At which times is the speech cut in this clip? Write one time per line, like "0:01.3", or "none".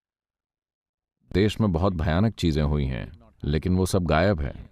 0:01.3